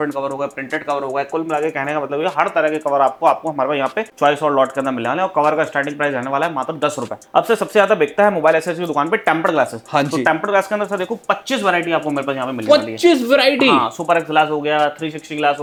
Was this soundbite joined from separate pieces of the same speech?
no; 0 cuts

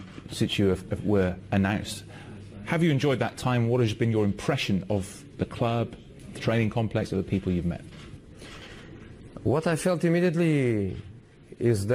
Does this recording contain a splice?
yes; 1 cut; at 3.1 s

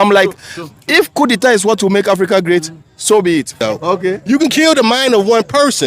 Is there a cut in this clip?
yes; 1 cut; at 3.6 s

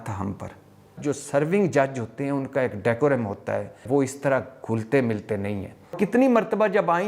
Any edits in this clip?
yes; 3 cuts; at 0.9 s, 3.8 s, 5.9 s

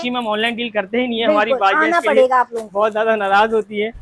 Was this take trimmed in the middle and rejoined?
no; 0 cuts

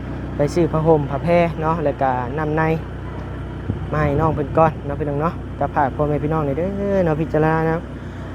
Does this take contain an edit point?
no; 0 cuts

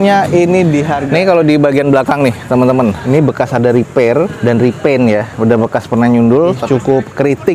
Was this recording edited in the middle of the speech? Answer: yes; 3 cuts; at 1.0 s, 3.0 s, 6.6 s

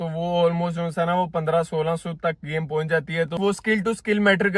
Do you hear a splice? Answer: yes; 1 cut; at 3.4 s

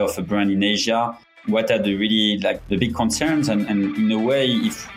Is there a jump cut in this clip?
yes; 3 cuts; at 1.3 s, 2.6 s, 3.7 s

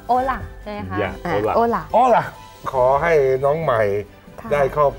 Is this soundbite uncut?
no; 1 cut; at 2.6 s

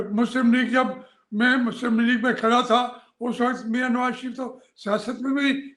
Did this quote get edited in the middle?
no; 0 cuts

